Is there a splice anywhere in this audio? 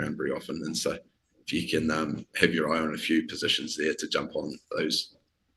no; 0 cuts

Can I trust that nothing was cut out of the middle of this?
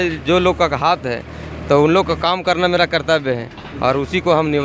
yes; 0 cuts

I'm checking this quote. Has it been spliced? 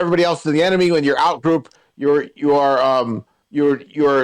no; 0 cuts

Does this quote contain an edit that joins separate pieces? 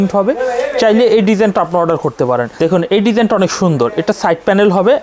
yes; 1 cut; at 2.5 s

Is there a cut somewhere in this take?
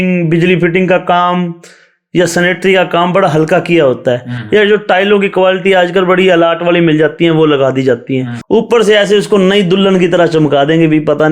no; 0 cuts

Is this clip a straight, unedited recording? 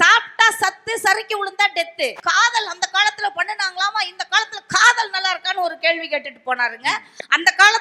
no; 1 cut; at 2.2 s

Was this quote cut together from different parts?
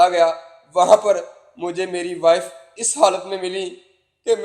no; 0 cuts

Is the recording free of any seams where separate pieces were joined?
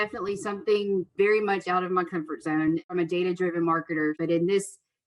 no; 3 cuts; at 1.1 s, 2.9 s, 4.2 s

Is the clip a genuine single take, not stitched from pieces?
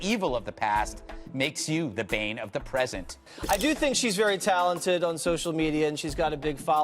no; 1 cut; at 3.1 s

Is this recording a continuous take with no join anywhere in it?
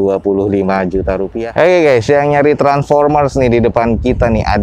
no; 1 cut; at 1.4 s

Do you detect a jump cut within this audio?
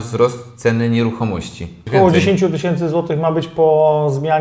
yes; 1 cut; at 1.7 s

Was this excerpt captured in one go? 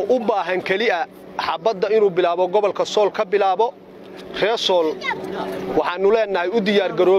no; 1 cut; at 5.2 s

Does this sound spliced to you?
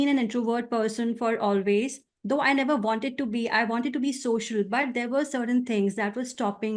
no; 0 cuts

